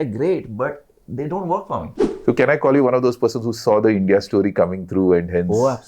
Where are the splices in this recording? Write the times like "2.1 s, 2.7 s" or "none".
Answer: 2.1 s

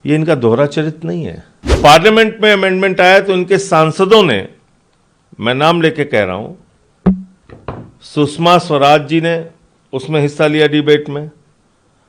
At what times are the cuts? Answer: 1.8 s

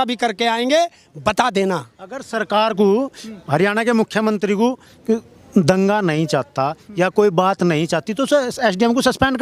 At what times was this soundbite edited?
none

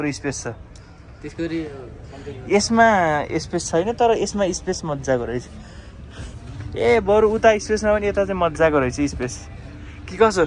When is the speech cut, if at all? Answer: none

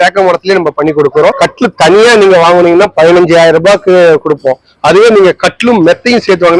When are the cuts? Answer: 1.4 s

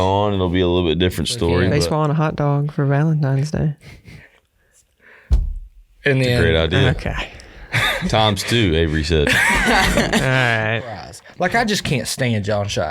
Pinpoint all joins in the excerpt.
1.7 s, 11.2 s

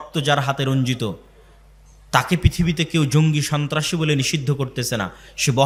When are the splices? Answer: none

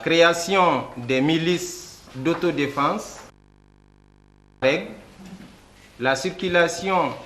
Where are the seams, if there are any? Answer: 2.1 s

